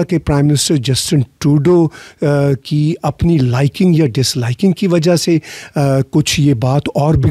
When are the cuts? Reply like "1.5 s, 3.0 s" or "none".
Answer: none